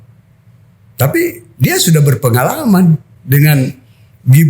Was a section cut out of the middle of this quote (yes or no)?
yes